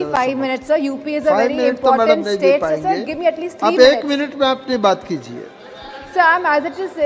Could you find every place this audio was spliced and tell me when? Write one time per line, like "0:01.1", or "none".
none